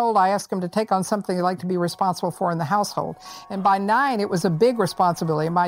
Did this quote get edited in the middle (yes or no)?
no